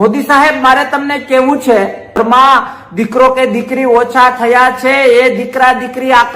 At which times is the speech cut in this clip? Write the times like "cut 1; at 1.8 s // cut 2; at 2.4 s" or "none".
cut 1; at 2.2 s